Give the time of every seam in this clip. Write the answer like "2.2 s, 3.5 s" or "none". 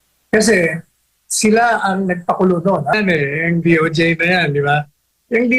2.9 s

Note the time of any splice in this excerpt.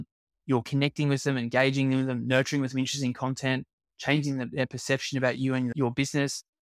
5.7 s

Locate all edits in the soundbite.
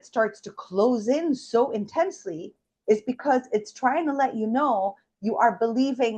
none

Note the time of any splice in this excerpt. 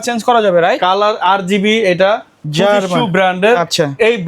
2.4 s

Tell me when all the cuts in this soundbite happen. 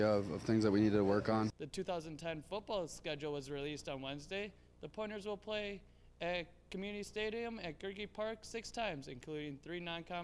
1.5 s

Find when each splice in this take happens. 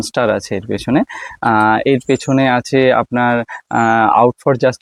none

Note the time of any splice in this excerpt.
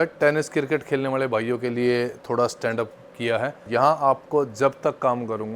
3.6 s

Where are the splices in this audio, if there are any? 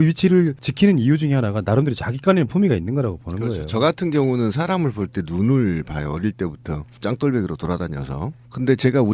1.7 s

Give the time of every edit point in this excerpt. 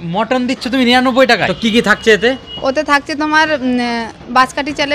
1.5 s

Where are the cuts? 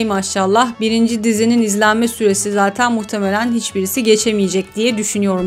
none

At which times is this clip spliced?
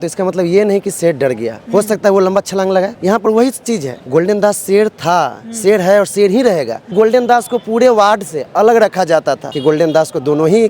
2.9 s, 3.9 s, 6.9 s, 9.5 s

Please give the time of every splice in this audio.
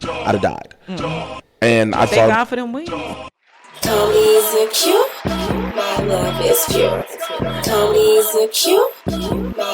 3.3 s

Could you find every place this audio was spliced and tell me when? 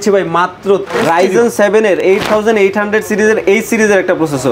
0.9 s

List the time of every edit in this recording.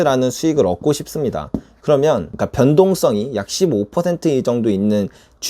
2.3 s

